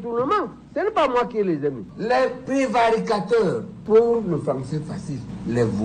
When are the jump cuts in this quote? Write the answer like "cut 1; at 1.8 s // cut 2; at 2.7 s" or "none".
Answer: cut 1; at 1.8 s